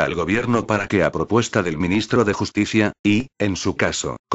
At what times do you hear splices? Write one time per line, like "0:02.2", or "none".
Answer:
0:01.3